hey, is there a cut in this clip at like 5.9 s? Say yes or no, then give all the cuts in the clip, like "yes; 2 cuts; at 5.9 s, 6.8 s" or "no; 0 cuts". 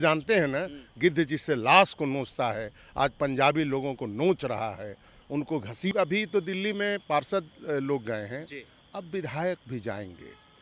yes; 1 cut; at 5.9 s